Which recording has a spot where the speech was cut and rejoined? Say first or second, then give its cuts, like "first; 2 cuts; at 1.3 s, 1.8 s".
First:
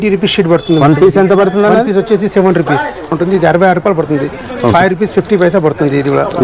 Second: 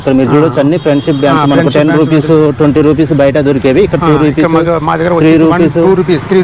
first; 1 cut; at 3.2 s